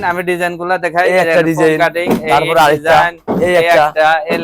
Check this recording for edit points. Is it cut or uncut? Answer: uncut